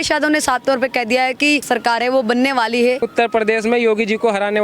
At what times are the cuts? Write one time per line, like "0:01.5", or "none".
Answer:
0:01.6
0:03.1